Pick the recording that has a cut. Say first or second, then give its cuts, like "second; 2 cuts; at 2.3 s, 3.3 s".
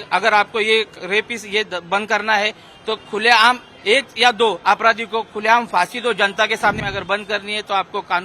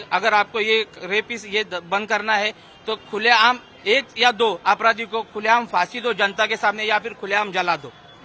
first; 1 cut; at 6.8 s